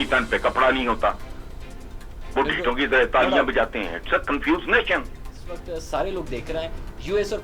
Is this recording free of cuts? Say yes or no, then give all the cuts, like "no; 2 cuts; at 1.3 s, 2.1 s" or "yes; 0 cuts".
no; 1 cut; at 5.5 s